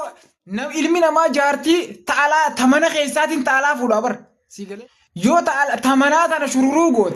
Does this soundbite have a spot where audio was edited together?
no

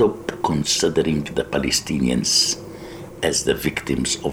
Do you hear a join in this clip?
no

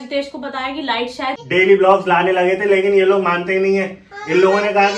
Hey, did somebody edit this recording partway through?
yes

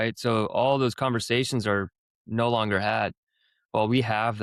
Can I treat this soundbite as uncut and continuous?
yes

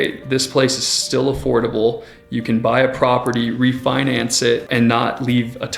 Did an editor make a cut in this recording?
yes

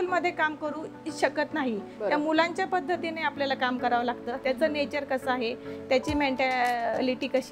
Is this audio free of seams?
yes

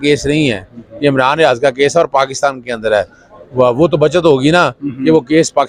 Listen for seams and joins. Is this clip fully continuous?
yes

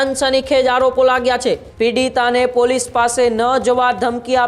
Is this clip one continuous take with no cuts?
no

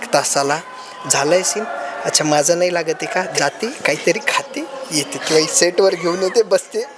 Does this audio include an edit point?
no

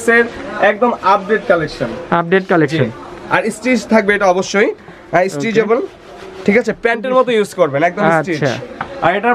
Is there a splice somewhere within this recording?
no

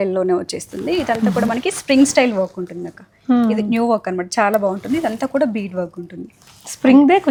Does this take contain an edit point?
no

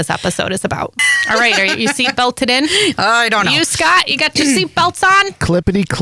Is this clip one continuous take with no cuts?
no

